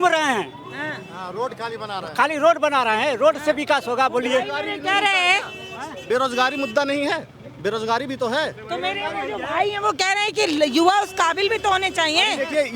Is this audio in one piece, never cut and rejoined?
yes; 0 cuts

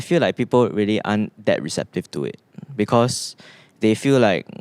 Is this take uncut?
yes; 0 cuts

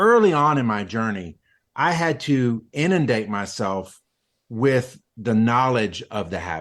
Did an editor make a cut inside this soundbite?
no; 0 cuts

